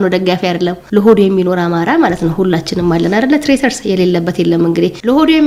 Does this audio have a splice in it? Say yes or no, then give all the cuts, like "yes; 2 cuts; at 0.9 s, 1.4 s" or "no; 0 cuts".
no; 0 cuts